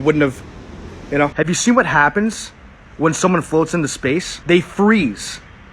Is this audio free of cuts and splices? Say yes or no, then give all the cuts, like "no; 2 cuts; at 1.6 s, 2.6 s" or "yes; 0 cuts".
no; 2 cuts; at 1.3 s, 4.3 s